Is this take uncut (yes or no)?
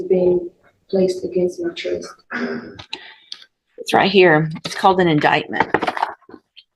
yes